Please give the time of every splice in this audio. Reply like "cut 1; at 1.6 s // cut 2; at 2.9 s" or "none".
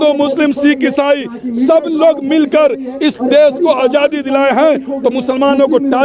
none